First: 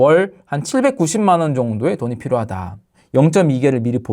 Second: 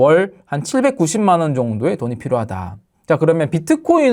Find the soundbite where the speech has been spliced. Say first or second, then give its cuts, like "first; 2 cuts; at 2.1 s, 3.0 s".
first; 1 cut; at 2.9 s